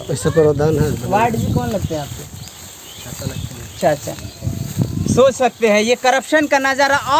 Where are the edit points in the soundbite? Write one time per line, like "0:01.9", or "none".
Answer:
none